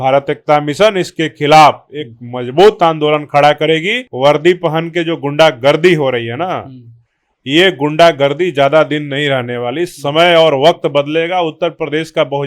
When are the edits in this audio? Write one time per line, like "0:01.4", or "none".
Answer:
0:04.0